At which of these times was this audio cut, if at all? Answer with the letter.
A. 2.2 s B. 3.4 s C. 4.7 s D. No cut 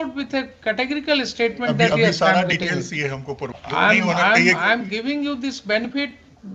B